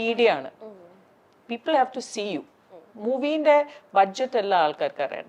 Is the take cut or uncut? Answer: uncut